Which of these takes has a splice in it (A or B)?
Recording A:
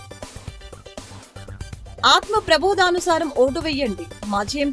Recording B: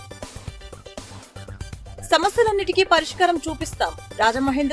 B